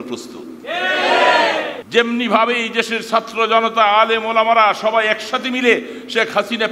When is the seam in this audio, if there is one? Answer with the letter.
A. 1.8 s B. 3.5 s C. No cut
A